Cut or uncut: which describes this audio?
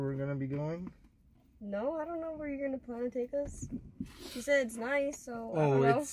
uncut